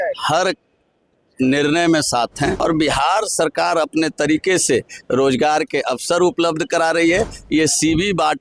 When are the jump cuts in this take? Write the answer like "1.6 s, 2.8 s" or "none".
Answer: 2.6 s